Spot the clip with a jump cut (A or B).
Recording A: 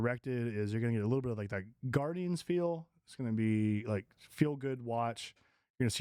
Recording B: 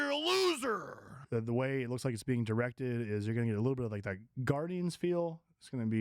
B